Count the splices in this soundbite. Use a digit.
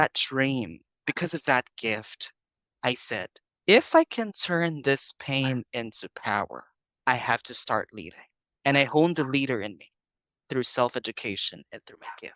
0